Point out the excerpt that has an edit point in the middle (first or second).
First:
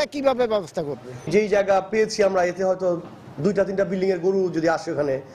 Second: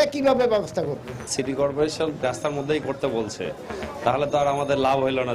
second